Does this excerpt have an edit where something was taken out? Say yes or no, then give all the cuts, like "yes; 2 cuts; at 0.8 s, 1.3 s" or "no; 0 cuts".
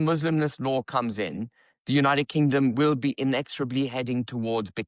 no; 0 cuts